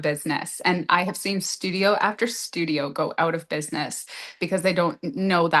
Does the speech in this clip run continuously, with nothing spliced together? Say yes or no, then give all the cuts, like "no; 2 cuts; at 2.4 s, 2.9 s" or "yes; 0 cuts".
yes; 0 cuts